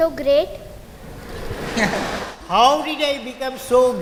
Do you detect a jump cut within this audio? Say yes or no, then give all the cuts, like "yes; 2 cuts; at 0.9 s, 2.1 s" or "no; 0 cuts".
no; 0 cuts